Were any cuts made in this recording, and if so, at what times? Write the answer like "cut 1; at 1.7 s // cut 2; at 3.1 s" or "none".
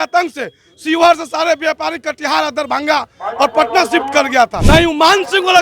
cut 1; at 4.6 s